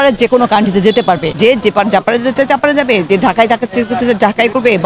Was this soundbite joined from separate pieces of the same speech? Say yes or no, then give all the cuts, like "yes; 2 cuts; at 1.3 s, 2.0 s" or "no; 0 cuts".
yes; 1 cut; at 1.3 s